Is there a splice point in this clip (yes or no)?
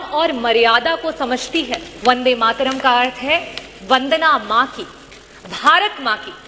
yes